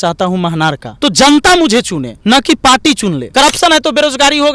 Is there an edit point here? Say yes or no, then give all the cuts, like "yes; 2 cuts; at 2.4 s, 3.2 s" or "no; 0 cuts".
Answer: yes; 3 cuts; at 0.9 s, 2.0 s, 3.2 s